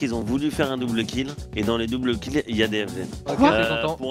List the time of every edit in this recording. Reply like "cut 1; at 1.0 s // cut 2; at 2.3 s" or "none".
cut 1; at 3.2 s